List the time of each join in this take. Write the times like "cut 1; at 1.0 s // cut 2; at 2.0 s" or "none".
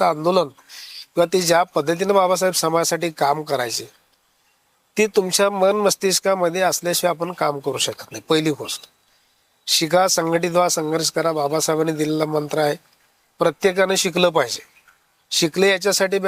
none